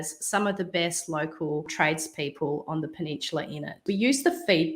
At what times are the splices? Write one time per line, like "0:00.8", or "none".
0:01.7
0:03.8